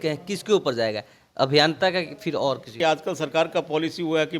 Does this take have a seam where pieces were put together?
yes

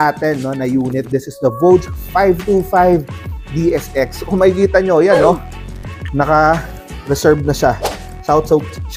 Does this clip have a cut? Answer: no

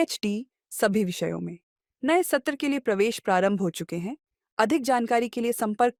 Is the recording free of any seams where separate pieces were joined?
yes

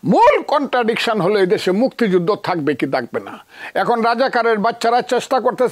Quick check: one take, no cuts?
yes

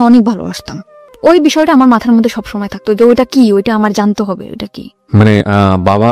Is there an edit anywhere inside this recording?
yes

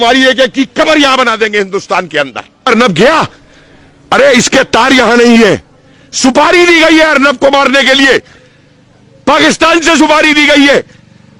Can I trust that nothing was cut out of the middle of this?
no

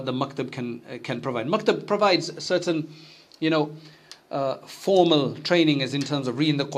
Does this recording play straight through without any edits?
yes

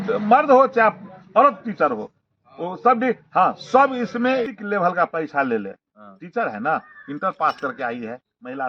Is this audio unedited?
no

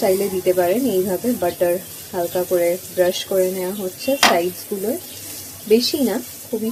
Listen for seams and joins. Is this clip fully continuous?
yes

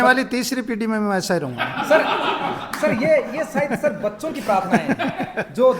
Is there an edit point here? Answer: no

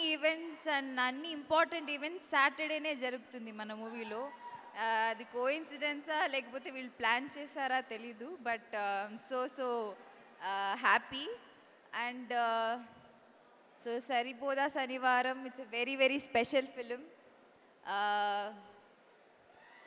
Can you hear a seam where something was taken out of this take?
no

